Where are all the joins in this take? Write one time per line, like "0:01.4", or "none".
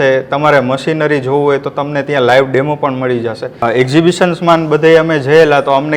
0:03.6